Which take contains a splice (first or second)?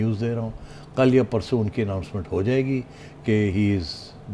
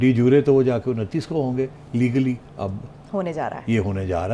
second